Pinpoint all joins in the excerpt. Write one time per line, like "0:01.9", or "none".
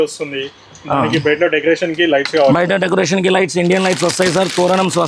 none